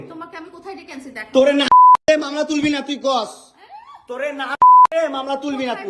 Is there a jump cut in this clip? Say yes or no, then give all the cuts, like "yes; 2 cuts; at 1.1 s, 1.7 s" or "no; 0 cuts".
no; 0 cuts